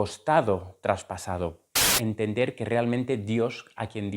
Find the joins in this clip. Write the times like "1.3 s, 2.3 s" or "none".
1.9 s